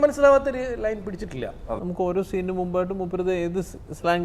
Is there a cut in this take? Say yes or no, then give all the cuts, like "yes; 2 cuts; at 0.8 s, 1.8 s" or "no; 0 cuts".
yes; 1 cut; at 1.8 s